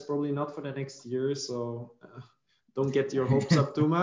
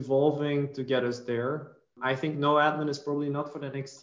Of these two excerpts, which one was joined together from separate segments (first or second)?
second